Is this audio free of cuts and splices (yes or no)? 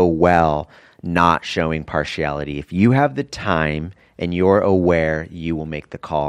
yes